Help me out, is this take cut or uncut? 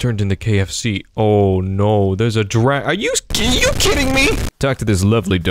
cut